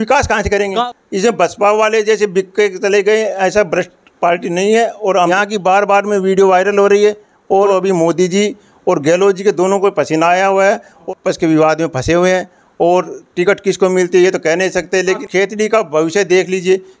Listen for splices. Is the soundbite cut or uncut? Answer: cut